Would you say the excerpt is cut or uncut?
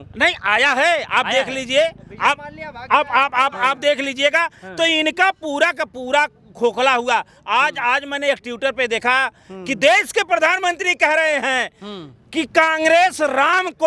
uncut